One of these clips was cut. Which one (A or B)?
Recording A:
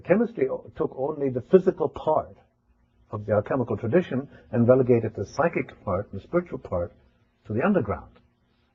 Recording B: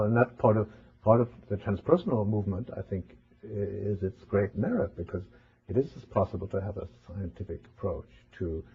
A